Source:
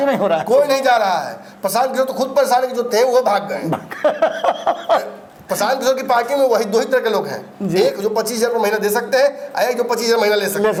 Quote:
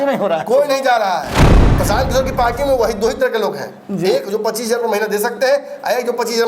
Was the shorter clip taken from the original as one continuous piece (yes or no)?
no